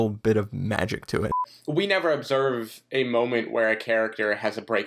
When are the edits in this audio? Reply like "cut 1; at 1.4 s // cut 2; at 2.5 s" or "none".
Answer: cut 1; at 1.3 s